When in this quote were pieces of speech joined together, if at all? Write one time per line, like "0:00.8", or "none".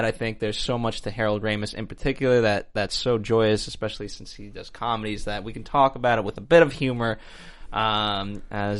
0:06.7